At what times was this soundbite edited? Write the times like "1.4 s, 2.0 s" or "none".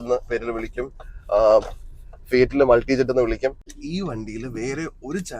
3.7 s